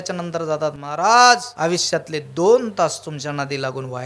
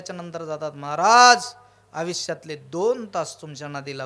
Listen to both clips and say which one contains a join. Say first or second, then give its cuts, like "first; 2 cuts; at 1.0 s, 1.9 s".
first; 1 cut; at 1.5 s